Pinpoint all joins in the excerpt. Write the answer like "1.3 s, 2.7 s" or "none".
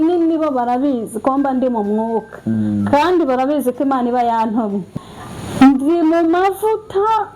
4.9 s